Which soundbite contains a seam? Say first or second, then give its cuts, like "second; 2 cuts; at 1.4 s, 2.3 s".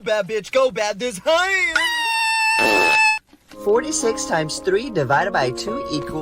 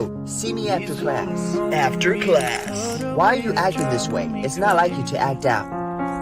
first; 1 cut; at 3.2 s